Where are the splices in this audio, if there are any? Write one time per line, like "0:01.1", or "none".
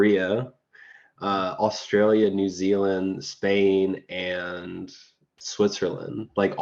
none